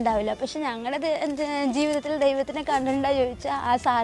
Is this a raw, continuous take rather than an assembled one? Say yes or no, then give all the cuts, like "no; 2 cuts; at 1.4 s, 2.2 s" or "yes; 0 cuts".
yes; 0 cuts